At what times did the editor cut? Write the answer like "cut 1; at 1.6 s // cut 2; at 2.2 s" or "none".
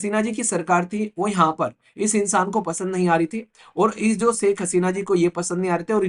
none